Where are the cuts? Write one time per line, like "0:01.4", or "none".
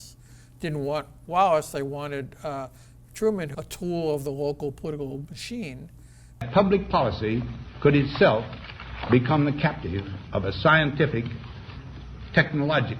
0:03.5
0:06.5